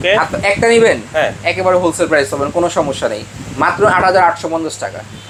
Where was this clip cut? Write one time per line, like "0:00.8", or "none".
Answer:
none